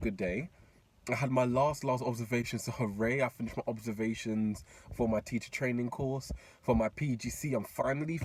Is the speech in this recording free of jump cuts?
yes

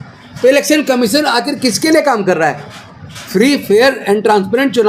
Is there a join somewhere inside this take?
no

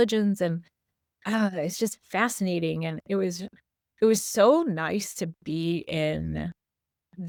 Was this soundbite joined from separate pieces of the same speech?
no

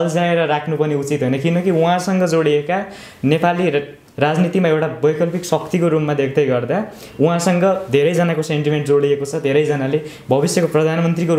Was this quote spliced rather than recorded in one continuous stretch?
no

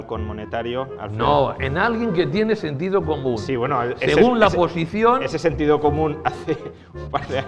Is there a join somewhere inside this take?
no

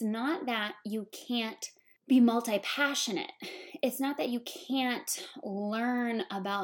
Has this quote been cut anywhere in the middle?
no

